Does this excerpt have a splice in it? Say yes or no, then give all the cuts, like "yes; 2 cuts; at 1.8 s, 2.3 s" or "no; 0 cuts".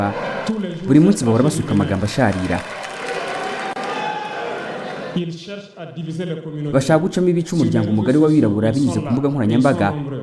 no; 0 cuts